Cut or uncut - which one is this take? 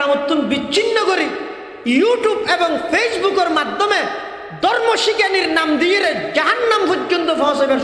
uncut